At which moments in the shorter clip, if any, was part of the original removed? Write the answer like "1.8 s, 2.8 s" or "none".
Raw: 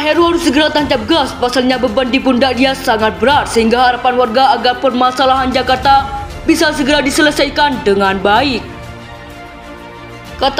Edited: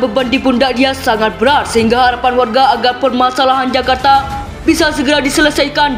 none